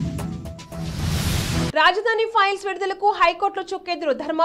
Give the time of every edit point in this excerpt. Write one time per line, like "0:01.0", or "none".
none